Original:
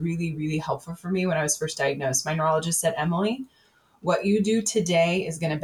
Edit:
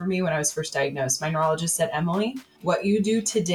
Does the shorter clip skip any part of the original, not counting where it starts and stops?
yes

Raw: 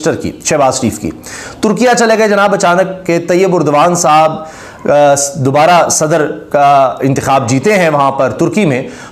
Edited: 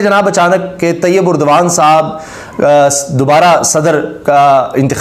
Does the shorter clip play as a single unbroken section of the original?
yes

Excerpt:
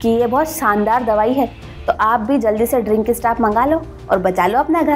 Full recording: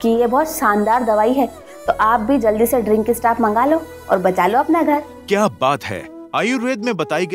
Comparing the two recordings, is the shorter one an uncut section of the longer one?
yes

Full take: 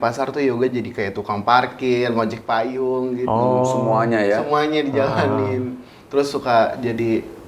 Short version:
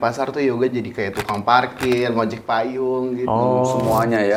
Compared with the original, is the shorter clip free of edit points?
yes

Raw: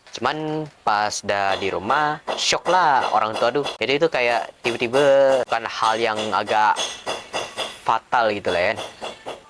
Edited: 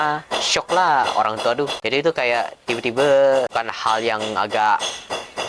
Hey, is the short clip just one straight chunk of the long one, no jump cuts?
yes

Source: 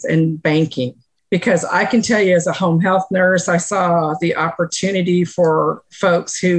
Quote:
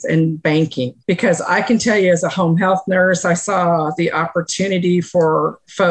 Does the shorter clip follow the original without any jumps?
no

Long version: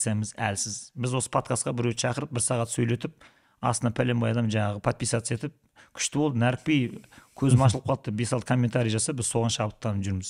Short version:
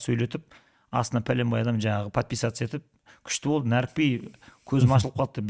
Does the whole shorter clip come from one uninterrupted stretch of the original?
yes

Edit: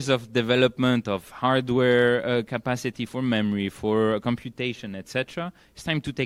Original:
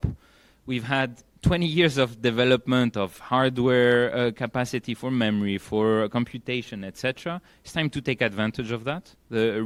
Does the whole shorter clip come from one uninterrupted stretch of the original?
yes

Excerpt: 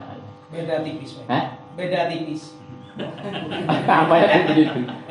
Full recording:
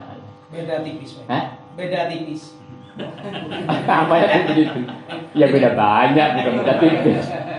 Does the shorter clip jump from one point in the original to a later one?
no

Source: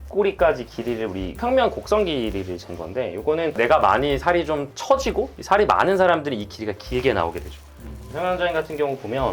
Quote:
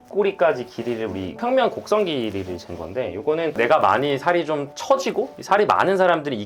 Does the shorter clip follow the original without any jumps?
yes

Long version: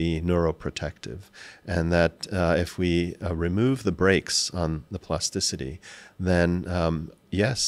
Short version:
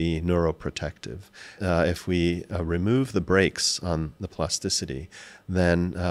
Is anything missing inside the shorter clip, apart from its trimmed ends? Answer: yes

